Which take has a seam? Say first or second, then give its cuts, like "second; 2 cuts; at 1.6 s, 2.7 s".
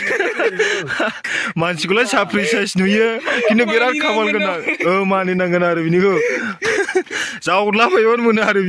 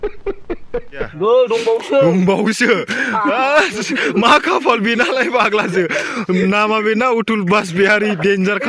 second; 1 cut; at 1.1 s